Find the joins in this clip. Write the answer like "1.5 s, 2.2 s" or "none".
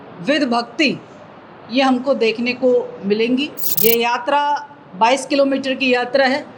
3.6 s